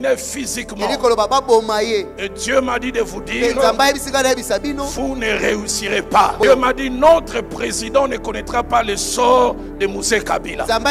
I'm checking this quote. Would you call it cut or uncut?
cut